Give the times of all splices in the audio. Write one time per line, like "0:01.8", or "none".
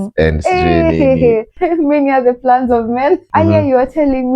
0:01.6
0:03.3